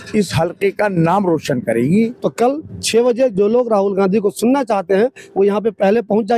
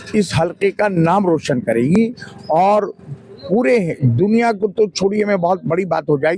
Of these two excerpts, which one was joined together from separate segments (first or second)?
first